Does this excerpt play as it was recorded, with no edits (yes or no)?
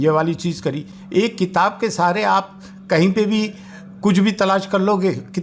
yes